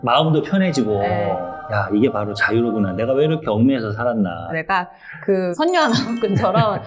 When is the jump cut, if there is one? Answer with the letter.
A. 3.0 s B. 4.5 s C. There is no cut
B